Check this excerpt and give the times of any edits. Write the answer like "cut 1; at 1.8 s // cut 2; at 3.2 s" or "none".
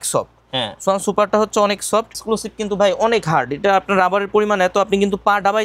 cut 1; at 2.2 s